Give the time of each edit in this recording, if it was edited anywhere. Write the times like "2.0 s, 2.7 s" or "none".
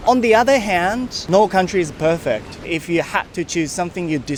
none